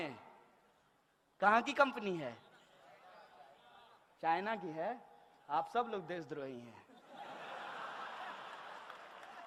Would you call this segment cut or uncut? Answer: uncut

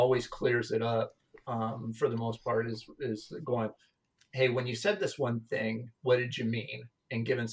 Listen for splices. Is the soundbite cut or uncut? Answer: uncut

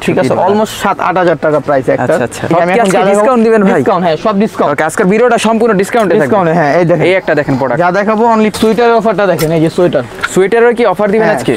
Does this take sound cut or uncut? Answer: cut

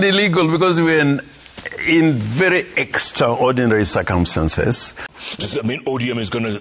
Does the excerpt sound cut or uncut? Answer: cut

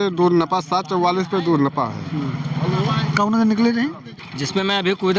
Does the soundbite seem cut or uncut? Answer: cut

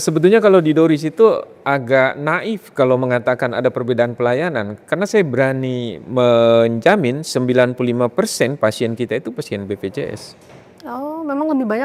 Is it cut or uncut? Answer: uncut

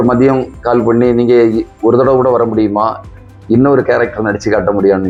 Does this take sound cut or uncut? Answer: uncut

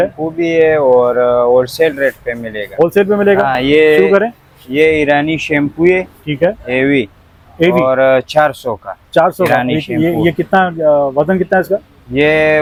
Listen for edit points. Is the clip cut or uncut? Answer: uncut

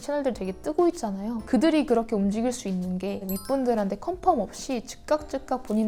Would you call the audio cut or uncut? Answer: uncut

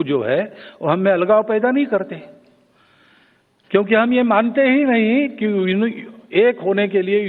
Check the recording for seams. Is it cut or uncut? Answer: uncut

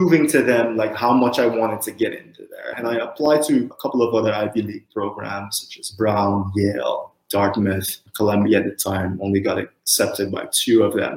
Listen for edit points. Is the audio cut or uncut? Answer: cut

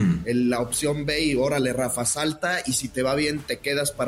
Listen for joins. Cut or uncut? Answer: uncut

